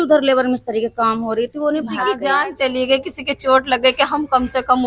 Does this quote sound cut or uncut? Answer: cut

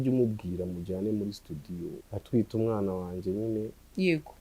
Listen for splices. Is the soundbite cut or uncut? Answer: cut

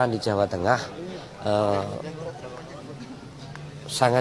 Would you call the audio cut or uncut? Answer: uncut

